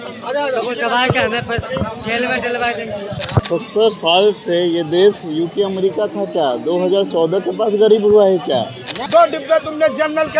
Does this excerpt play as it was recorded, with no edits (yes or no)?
no